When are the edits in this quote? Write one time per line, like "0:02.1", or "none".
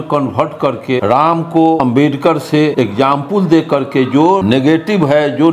0:01.0
0:01.8
0:02.7
0:04.4